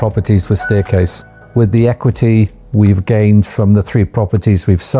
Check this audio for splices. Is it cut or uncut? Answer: cut